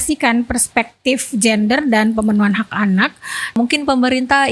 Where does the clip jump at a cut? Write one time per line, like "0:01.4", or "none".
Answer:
0:03.6